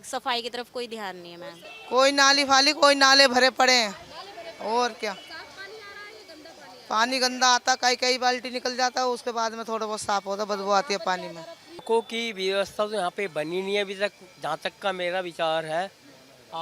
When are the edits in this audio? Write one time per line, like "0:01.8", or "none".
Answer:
0:01.7
0:11.8

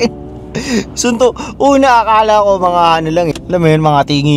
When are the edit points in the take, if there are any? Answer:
0:03.3

